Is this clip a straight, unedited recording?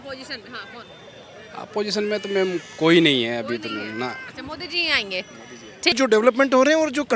no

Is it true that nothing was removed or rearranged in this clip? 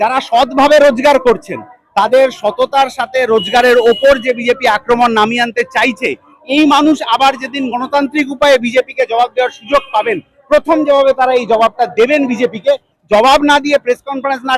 no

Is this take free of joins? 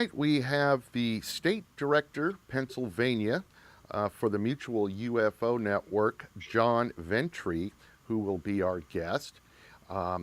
yes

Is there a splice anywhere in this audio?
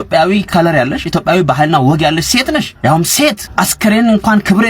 yes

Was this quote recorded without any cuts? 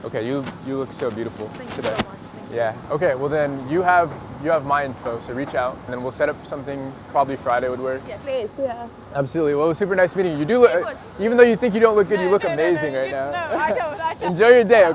no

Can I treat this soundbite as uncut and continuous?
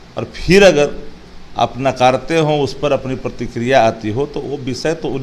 yes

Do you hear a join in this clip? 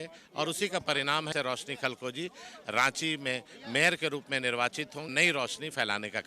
yes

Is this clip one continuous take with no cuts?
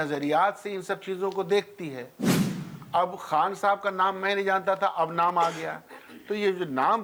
yes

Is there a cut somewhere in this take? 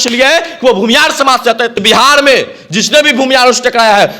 yes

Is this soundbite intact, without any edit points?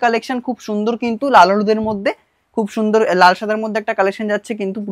yes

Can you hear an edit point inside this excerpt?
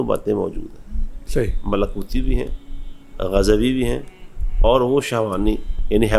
no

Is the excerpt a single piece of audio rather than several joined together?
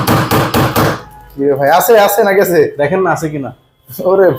yes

